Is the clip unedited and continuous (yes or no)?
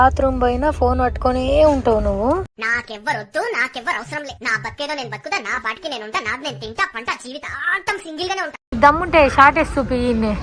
no